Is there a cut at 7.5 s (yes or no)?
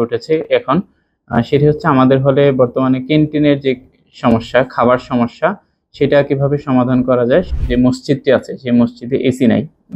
yes